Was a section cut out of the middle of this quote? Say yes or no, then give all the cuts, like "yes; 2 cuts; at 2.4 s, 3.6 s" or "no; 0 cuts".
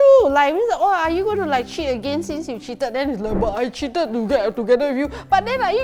no; 0 cuts